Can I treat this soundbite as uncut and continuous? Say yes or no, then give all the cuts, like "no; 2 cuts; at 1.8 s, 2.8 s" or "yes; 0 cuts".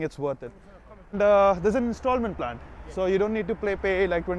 no; 1 cut; at 1.1 s